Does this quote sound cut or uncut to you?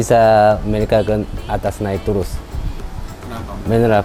uncut